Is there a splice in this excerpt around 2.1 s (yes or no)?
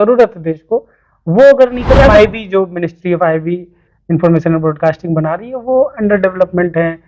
yes